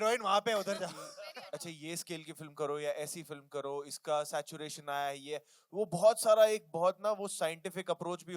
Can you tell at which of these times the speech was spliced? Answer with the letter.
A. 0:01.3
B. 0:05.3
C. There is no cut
A